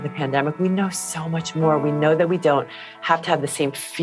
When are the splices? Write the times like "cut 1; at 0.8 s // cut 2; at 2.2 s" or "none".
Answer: none

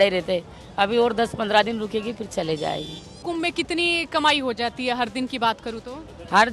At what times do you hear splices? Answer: cut 1; at 3.2 s

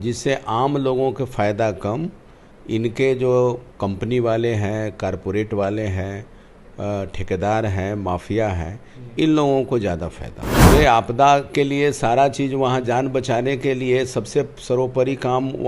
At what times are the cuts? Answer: cut 1; at 10.6 s

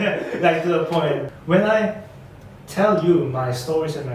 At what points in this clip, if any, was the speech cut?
cut 1; at 1.3 s

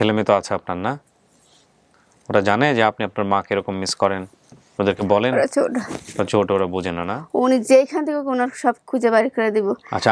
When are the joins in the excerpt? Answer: cut 1; at 7.2 s

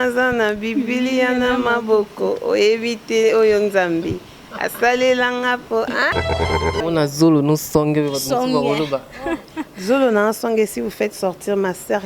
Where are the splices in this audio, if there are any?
cut 1; at 6.5 s

